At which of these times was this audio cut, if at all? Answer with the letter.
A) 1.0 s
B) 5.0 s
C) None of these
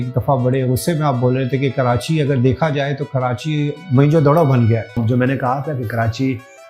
B